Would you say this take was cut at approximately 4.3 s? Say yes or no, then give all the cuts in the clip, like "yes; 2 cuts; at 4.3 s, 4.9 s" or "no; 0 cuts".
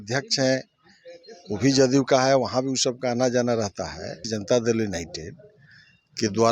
yes; 1 cut; at 4.3 s